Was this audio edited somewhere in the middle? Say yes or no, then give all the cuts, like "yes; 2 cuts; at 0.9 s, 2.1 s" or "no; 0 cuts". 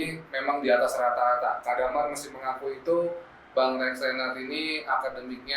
no; 0 cuts